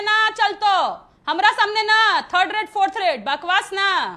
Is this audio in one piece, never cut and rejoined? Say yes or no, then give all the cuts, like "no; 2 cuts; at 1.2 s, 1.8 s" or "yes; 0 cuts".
yes; 0 cuts